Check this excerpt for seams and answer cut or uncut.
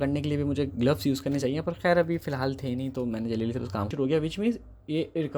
cut